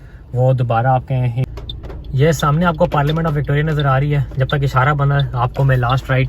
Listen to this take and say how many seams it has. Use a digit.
1